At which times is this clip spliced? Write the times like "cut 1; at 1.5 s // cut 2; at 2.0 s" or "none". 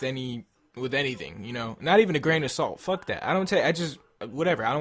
cut 1; at 2.8 s